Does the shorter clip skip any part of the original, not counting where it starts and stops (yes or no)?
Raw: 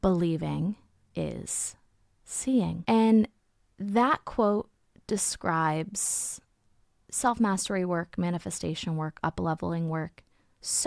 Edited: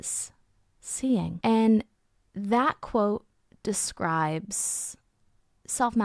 no